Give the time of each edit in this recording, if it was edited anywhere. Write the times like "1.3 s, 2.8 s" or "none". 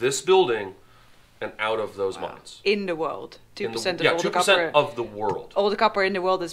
none